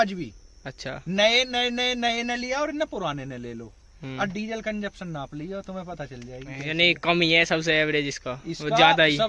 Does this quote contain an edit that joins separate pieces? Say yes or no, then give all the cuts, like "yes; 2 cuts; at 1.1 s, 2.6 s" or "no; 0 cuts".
no; 0 cuts